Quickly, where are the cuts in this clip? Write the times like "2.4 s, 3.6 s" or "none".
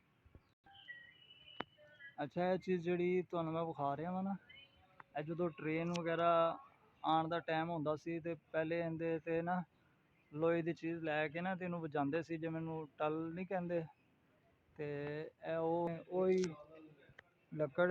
15.9 s